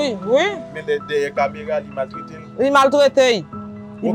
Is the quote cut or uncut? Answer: uncut